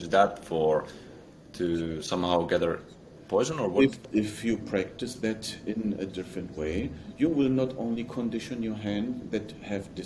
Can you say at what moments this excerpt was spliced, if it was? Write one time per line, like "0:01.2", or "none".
0:04.1